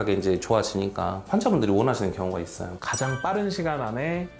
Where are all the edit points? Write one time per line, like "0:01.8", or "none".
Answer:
none